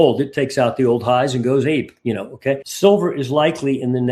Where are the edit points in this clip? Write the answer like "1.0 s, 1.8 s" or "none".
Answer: 2.7 s